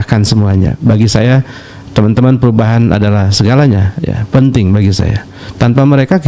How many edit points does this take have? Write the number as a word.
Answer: zero